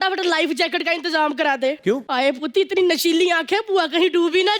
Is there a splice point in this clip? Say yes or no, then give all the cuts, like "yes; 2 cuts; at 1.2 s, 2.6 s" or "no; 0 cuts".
yes; 1 cut; at 2.0 s